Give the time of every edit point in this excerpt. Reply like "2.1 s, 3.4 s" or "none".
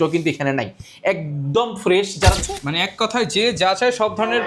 2.4 s